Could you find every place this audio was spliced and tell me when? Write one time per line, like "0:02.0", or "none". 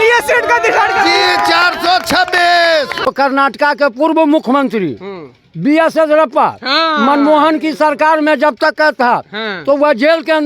0:03.1

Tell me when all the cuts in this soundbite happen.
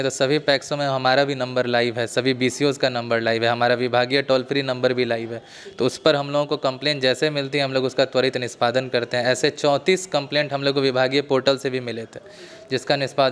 none

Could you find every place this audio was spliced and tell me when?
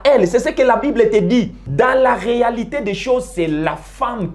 0:01.6

